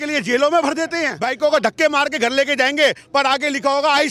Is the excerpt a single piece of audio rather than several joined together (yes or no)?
no